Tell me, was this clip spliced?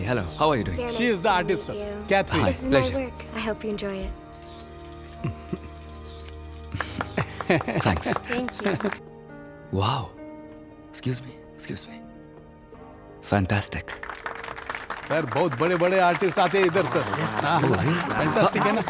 yes; 2 cuts; at 9.0 s, 12.7 s

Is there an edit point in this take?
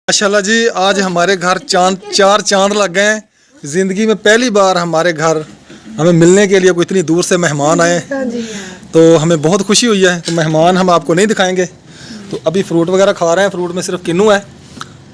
no; 0 cuts

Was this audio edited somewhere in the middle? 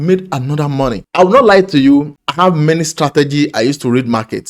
yes; 1 cut; at 1.0 s

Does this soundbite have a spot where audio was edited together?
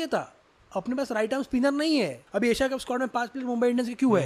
yes; 1 cut; at 2.2 s

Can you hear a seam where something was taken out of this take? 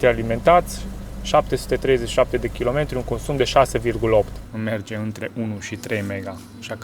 yes; 1 cut; at 4.4 s

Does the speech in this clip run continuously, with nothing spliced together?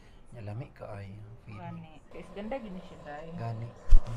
no; 1 cut; at 2.1 s

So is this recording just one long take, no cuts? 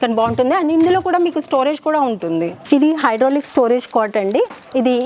no; 1 cut; at 2.5 s

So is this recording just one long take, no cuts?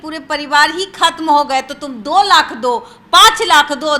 yes; 0 cuts

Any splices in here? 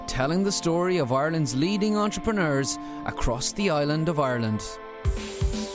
no; 0 cuts

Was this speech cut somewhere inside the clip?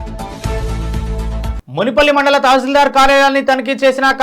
yes; 1 cut; at 1.5 s

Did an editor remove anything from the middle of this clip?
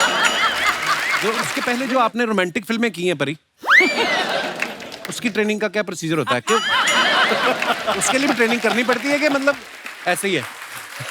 yes; 1 cut; at 1.5 s

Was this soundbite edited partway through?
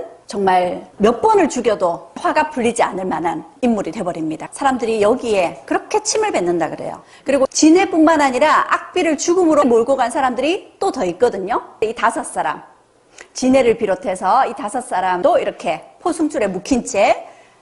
yes; 1 cut; at 7.1 s

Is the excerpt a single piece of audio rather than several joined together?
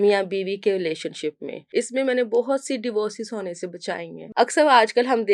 no; 2 cuts; at 1.5 s, 4.2 s

